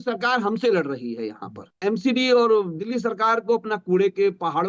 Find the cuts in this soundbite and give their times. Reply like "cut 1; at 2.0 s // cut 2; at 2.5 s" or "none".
cut 1; at 1.8 s